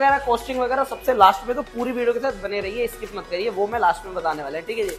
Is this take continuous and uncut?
yes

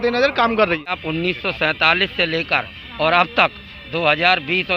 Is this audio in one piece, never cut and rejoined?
no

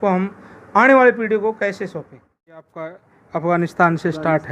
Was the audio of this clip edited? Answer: yes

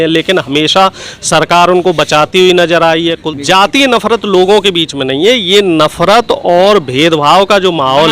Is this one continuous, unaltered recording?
no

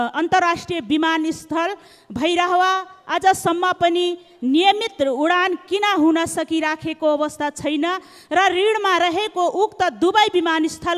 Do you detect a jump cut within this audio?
no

